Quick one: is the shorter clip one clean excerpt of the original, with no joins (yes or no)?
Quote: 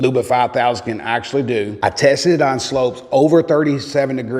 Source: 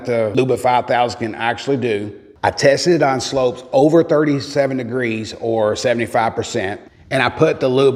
no